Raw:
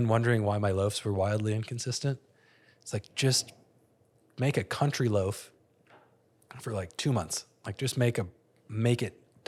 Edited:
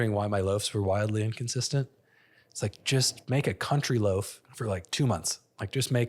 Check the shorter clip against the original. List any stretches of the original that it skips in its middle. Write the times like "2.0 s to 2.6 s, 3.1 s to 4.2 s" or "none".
3.5 s to 4.3 s, 5.5 s to 6.5 s

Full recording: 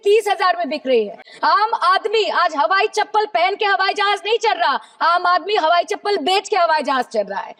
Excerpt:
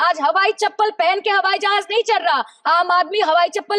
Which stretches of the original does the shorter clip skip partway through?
none

